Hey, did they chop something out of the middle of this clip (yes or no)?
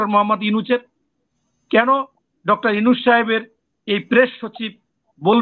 no